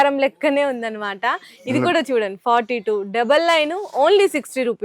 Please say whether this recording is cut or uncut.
uncut